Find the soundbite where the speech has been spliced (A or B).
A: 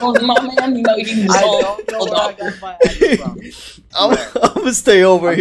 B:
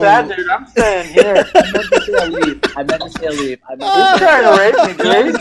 A